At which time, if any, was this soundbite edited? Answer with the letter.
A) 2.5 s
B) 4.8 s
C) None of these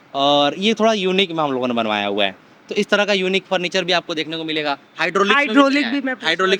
C